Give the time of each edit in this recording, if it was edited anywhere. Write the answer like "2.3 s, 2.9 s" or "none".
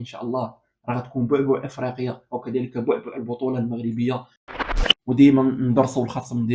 4.6 s